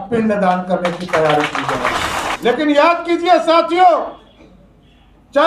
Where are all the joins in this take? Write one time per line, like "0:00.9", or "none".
0:02.3